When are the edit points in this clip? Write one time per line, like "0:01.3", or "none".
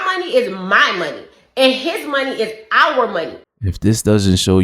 0:03.4